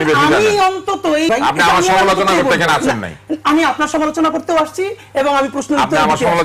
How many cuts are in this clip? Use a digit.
1